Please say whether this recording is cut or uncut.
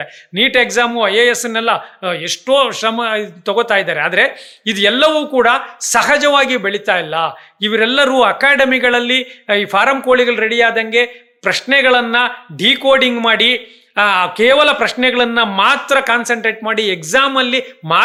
uncut